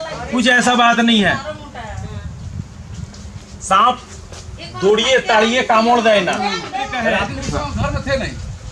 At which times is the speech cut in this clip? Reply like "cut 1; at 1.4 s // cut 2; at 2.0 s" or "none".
cut 1; at 7.2 s